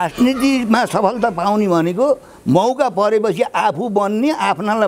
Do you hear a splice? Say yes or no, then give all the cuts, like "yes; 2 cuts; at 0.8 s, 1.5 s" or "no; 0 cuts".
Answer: no; 0 cuts